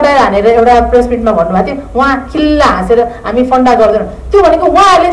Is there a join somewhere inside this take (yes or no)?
no